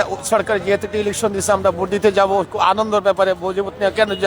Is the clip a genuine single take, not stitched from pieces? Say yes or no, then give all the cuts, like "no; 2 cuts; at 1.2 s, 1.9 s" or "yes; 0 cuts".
yes; 0 cuts